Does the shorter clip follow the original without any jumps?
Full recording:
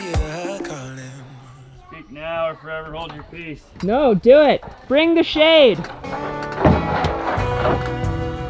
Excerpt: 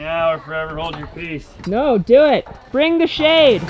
yes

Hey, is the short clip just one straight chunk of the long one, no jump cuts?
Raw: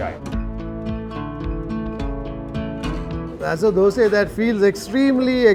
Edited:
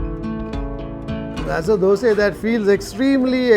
no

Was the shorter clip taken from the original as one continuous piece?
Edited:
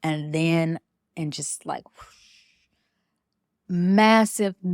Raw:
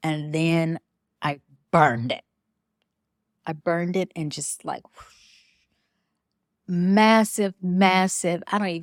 no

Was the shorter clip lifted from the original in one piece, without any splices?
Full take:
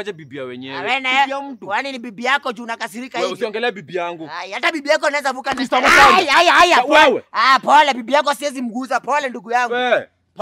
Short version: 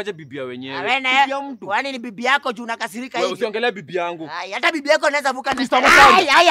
yes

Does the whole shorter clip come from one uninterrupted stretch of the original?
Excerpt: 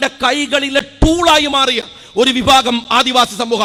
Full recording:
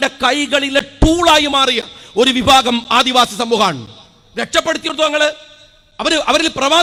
yes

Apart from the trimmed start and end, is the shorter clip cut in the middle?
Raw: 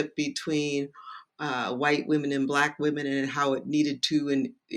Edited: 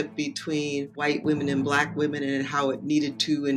yes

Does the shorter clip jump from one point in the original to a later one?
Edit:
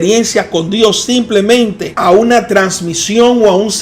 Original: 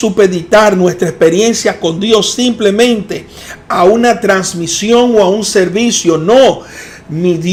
yes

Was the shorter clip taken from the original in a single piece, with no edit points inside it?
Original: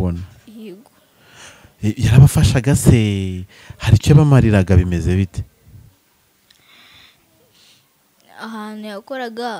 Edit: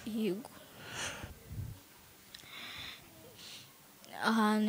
no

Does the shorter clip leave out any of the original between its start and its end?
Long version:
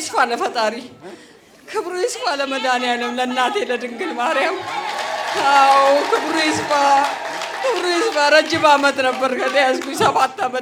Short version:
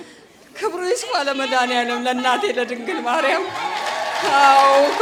no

